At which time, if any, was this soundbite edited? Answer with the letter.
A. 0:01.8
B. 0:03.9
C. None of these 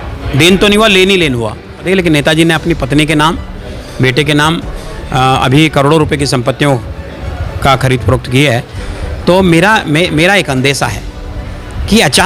A